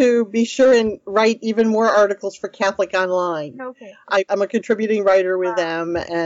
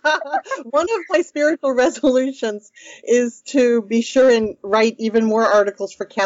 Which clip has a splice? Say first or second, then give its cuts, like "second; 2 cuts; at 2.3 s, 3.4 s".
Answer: first; 1 cut; at 4.3 s